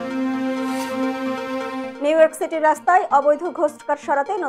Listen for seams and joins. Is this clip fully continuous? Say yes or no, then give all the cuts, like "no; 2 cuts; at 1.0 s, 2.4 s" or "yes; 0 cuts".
yes; 0 cuts